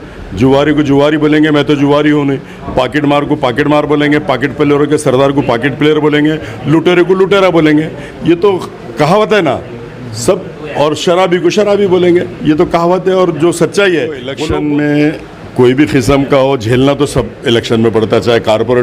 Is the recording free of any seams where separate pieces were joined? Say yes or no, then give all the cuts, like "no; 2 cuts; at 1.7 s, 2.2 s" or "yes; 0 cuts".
no; 1 cut; at 14.3 s